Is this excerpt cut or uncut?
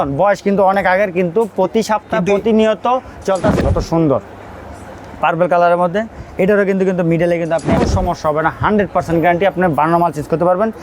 cut